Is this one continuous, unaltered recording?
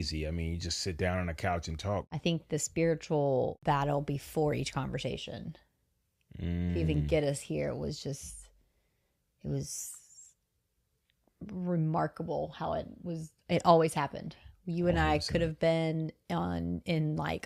no; 2 cuts; at 2.1 s, 3.6 s

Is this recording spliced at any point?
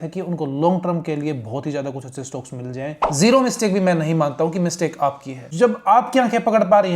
yes; 2 cuts; at 3.0 s, 5.4 s

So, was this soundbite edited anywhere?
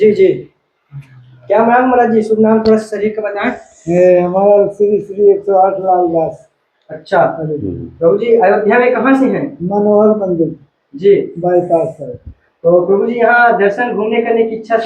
no; 0 cuts

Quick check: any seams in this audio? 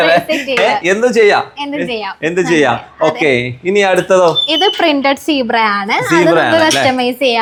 no; 0 cuts

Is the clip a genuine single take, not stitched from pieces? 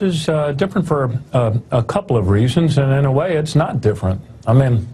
no; 1 cut; at 1.9 s

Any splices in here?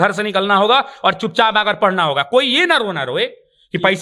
no; 0 cuts

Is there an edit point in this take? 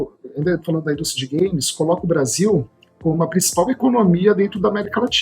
no; 0 cuts

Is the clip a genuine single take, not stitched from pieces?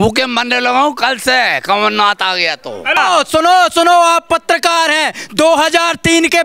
no; 1 cut; at 3.0 s

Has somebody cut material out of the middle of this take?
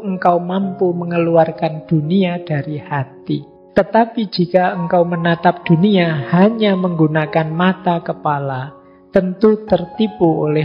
yes; 1 cut; at 3.6 s

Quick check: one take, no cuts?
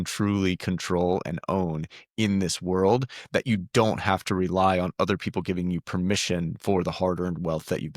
yes; 0 cuts

